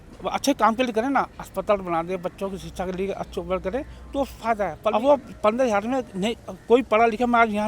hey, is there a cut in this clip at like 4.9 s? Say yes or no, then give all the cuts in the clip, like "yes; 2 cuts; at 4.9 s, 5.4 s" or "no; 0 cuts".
yes; 1 cut; at 4.9 s